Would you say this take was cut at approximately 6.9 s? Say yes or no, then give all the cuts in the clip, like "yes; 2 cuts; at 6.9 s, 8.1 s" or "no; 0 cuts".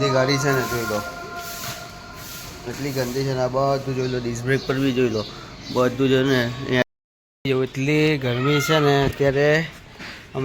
yes; 1 cut; at 6.9 s